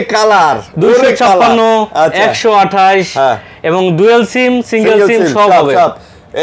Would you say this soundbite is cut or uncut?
uncut